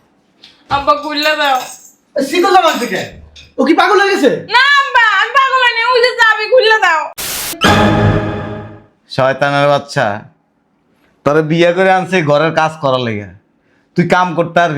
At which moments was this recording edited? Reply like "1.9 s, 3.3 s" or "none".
7.5 s